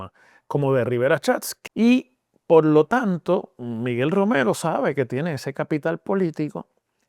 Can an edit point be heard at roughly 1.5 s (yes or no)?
yes